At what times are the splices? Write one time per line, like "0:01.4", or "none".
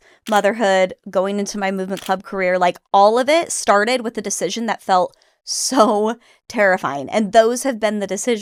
none